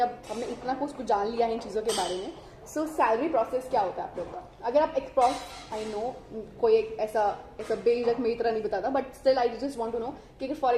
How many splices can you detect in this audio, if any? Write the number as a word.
zero